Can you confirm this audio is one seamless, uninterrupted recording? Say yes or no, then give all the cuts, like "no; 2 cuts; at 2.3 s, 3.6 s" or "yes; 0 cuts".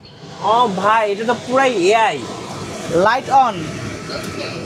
yes; 0 cuts